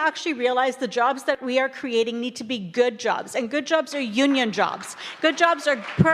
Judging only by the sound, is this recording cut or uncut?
cut